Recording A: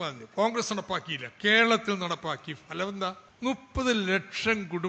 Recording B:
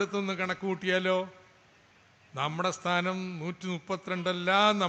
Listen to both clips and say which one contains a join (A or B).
A